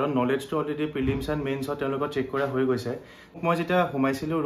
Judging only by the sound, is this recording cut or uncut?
cut